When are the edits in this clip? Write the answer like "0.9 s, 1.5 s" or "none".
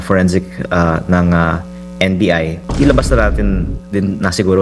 2.6 s